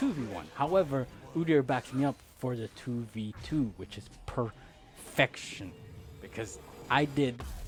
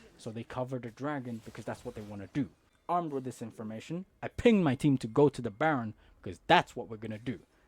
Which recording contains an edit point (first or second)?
second